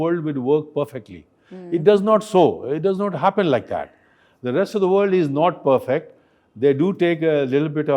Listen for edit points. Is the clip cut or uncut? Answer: uncut